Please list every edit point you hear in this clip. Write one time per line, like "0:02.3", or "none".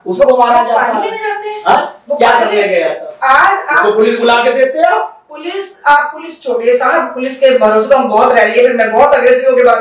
none

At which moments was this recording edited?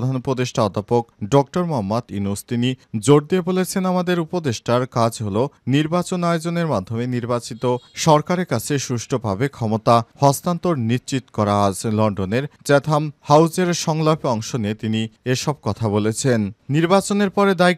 none

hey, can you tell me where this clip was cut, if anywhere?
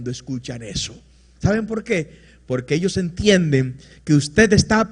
none

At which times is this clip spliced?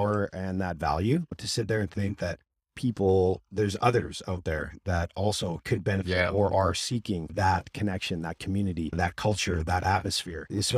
0:01.3

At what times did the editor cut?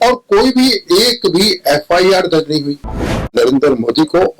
0:03.3

